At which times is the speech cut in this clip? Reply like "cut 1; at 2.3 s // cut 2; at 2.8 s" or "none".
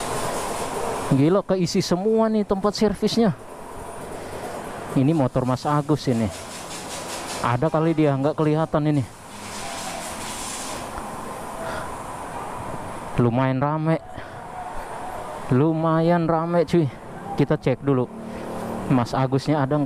none